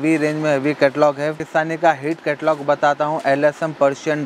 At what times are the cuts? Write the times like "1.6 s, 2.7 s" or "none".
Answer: 1.4 s